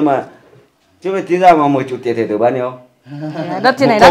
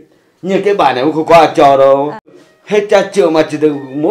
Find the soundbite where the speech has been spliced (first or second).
second